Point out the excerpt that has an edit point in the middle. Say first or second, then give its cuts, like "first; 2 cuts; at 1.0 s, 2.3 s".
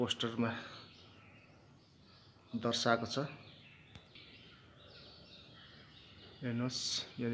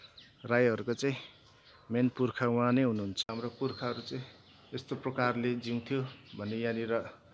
second; 1 cut; at 3.2 s